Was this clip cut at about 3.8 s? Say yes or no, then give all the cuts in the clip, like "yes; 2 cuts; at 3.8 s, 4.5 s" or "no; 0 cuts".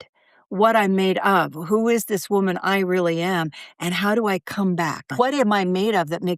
no; 1 cut; at 5.1 s